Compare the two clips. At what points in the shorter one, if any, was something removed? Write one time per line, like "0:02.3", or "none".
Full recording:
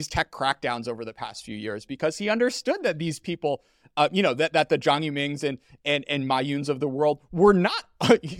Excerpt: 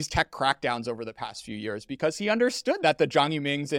0:02.8